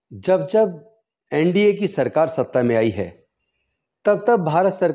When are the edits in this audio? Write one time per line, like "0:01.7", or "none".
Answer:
none